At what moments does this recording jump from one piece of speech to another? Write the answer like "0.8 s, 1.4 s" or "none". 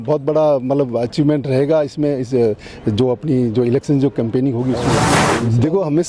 5.2 s